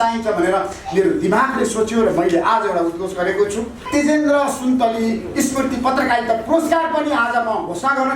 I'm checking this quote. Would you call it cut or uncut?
cut